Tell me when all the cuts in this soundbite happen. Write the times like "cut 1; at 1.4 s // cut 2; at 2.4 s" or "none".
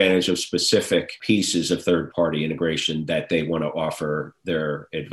cut 1; at 1.1 s // cut 2; at 2.1 s